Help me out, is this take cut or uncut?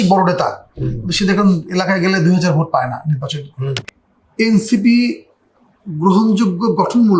cut